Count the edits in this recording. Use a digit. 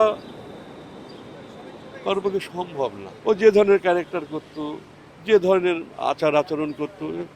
1